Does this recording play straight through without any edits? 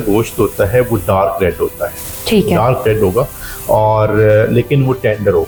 yes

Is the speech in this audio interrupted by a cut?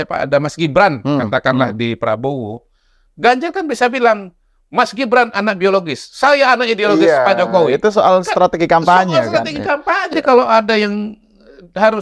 yes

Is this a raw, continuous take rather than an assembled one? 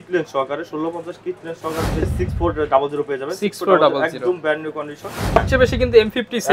no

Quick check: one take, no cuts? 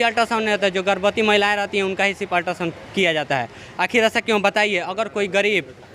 yes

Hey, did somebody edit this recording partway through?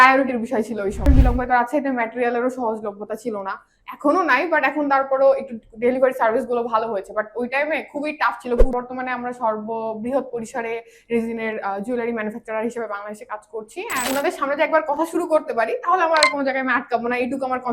yes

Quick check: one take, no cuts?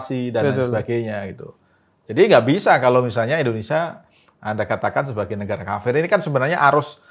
yes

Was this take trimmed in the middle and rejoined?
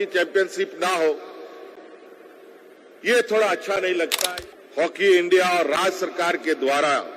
yes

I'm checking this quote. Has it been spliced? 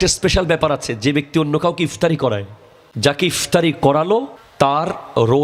yes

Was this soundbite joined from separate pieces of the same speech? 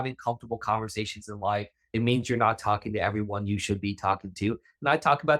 no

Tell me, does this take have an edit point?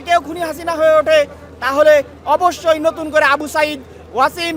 no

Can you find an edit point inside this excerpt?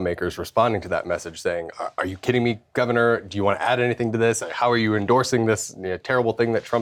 no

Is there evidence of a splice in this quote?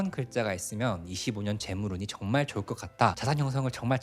no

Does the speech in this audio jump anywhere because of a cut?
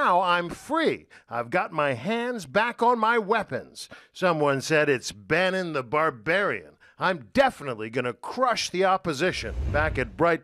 no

